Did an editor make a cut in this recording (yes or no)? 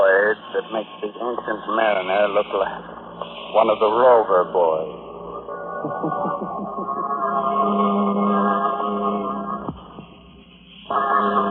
no